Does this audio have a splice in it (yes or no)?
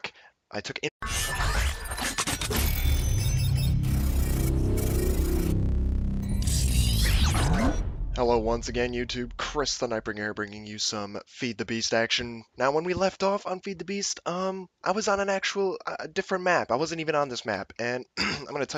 no